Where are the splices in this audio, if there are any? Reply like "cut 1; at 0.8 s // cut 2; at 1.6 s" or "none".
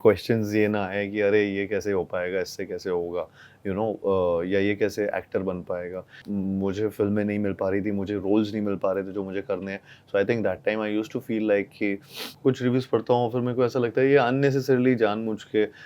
cut 1; at 6.2 s // cut 2; at 12.3 s

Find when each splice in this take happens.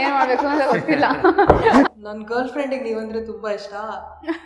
cut 1; at 1.8 s

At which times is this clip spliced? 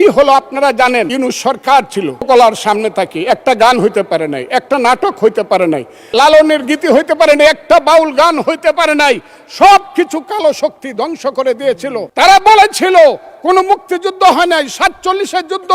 cut 1; at 1.1 s // cut 2; at 2.3 s // cut 3; at 6.0 s // cut 4; at 12.1 s

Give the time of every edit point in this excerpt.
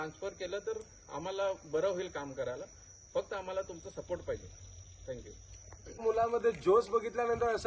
cut 1; at 6.0 s

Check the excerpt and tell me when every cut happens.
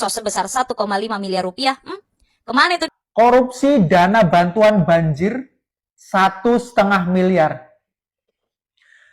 cut 1; at 3.0 s

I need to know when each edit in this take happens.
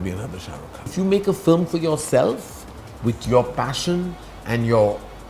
cut 1; at 0.9 s

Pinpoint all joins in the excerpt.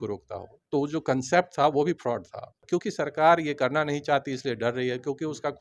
cut 1; at 2.6 s

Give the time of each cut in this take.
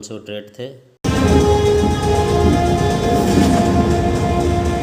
cut 1; at 1.0 s

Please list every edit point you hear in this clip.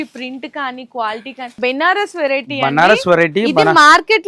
cut 1; at 1.5 s

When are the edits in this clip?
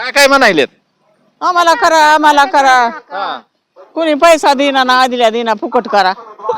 none

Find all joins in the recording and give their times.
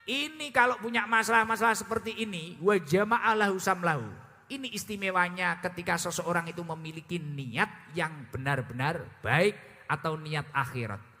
none

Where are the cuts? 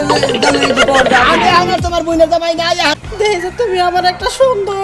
cut 1; at 3.0 s

